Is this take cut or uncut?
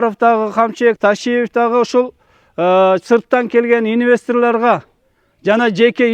cut